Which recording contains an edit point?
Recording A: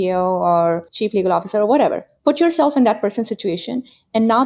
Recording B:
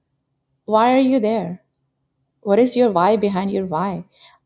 A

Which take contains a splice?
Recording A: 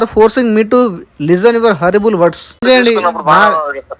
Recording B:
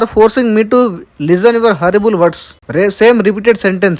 A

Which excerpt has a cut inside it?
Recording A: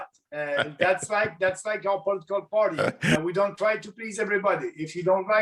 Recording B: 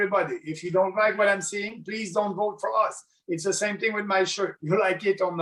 A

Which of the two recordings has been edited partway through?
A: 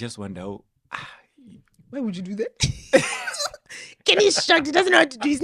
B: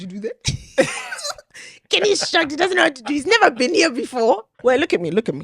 B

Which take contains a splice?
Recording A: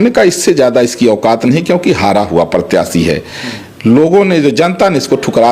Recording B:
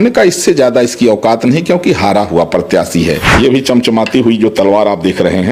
B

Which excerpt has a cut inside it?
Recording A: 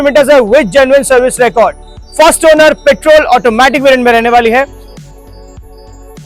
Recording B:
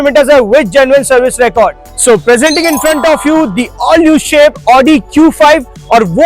B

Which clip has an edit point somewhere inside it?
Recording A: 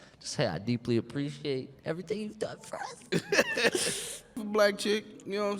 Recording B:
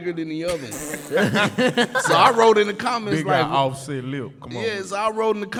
A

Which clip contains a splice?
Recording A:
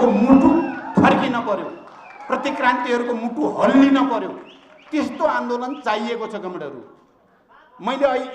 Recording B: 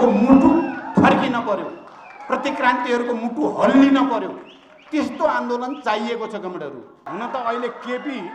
B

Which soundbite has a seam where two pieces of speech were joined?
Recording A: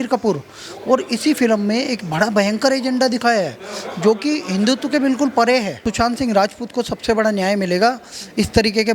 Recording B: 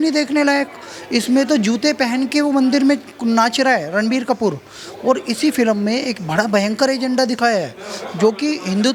A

